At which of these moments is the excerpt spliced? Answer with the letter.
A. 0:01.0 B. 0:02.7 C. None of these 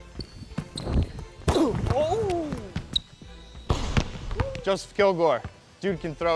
B